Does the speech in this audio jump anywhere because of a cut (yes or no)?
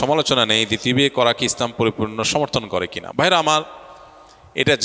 no